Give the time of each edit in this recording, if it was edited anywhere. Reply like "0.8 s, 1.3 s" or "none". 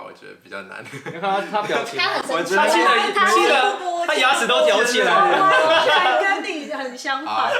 none